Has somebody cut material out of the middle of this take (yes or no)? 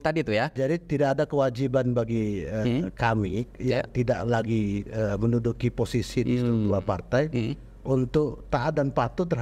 no